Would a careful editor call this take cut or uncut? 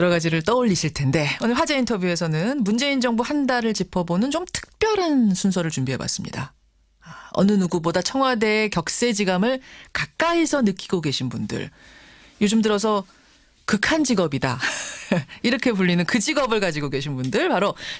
uncut